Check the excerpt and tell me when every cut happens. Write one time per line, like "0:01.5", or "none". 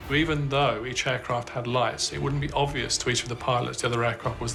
none